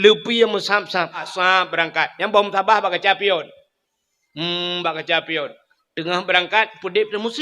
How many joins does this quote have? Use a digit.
1